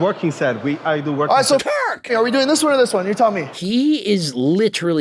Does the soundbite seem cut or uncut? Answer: cut